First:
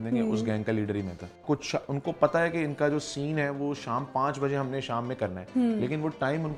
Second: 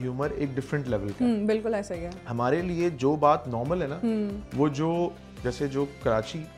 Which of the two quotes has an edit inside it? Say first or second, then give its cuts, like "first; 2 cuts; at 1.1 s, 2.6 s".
first; 1 cut; at 1.3 s